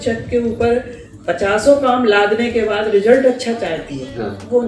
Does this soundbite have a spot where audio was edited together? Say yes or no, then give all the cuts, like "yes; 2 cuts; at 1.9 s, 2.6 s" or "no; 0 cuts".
no; 0 cuts